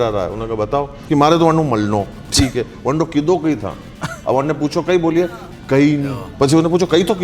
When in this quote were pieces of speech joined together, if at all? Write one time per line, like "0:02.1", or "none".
0:00.9
0:06.2